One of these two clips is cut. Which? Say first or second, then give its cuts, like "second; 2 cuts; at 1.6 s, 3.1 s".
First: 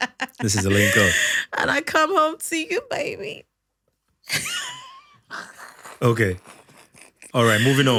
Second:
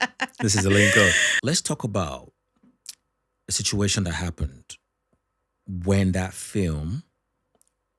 second; 1 cut; at 1.3 s